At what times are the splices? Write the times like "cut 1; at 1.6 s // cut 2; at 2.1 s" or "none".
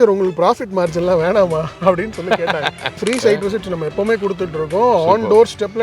cut 1; at 3.0 s

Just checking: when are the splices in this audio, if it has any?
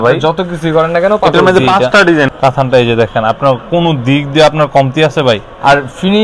cut 1; at 2.3 s

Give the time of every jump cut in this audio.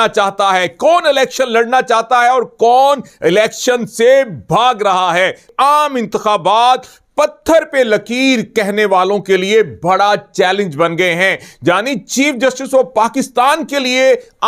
cut 1; at 5.5 s

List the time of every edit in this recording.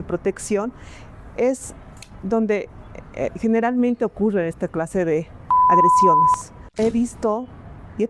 cut 1; at 6.8 s

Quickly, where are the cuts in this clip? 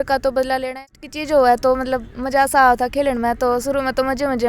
cut 1; at 0.9 s

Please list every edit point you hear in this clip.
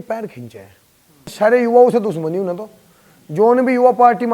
cut 1; at 1.3 s

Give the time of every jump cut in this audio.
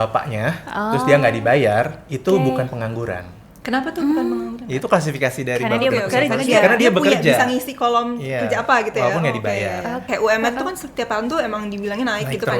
cut 1; at 10.1 s

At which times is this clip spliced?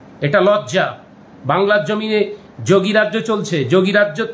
none

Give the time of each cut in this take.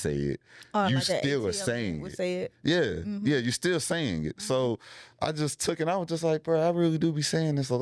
none

